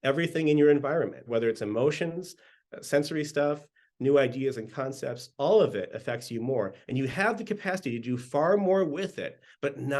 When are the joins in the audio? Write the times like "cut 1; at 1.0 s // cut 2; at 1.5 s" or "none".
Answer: cut 1; at 1.2 s